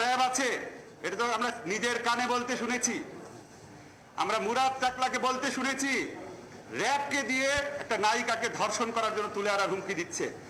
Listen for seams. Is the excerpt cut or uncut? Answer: uncut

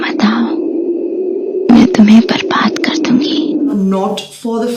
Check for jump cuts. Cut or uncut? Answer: cut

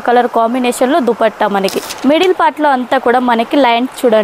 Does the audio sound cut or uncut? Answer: cut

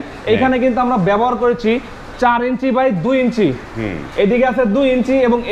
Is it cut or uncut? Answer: uncut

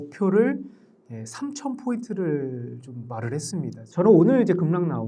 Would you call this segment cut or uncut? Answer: cut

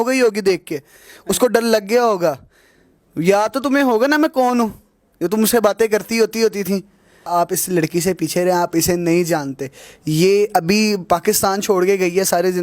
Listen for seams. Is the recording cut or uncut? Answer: cut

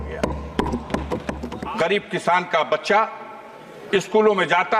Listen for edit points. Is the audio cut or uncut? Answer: cut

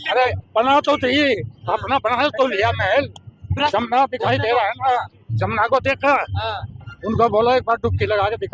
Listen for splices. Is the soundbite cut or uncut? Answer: cut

